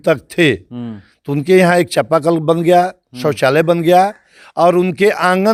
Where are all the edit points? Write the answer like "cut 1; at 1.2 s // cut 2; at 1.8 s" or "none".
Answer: none